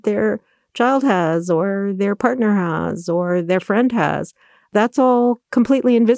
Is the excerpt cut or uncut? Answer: cut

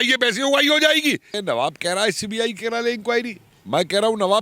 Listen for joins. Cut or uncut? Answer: cut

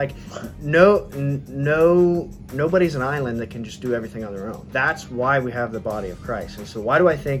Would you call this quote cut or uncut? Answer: cut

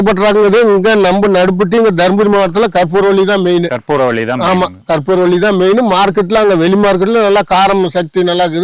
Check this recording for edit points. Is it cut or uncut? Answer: uncut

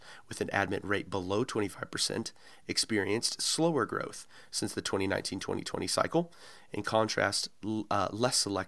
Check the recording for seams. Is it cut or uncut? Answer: uncut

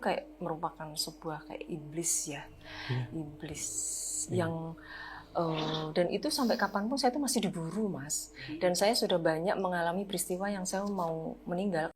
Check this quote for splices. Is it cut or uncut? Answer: uncut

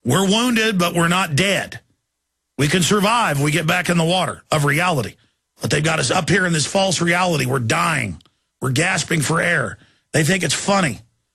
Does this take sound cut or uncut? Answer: cut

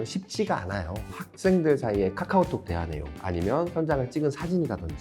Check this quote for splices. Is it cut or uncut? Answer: cut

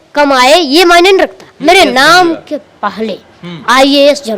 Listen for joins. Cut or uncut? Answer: cut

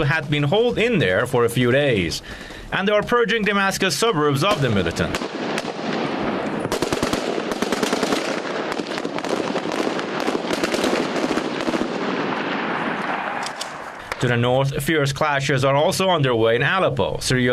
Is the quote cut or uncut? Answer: uncut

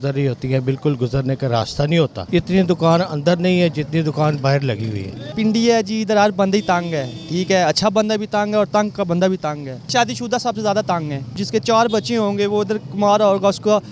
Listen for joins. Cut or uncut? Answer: cut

